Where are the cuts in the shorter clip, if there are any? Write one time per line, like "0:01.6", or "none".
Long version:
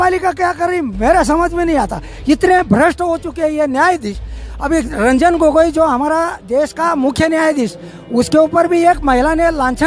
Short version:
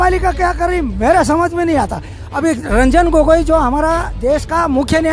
0:02.1